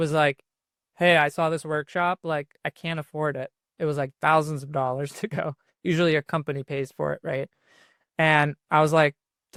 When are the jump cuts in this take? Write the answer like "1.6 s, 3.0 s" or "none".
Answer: none